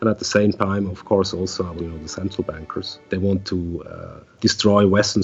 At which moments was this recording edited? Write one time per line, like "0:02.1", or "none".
0:01.7
0:03.0
0:04.3